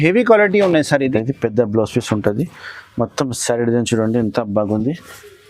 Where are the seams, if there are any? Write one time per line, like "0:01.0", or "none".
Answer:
0:01.1